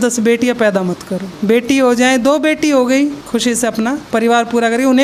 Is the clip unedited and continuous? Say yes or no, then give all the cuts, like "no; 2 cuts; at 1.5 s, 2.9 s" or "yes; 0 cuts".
yes; 0 cuts